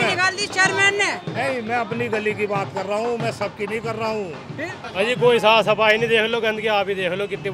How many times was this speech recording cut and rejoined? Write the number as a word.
one